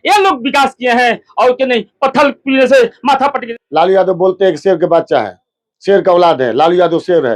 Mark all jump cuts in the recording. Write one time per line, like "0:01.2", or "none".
0:03.5